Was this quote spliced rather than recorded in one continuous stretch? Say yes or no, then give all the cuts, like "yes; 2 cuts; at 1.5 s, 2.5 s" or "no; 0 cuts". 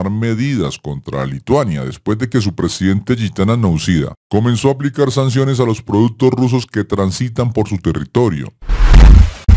no; 0 cuts